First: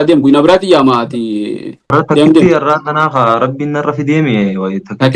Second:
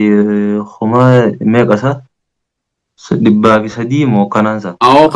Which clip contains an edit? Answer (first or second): first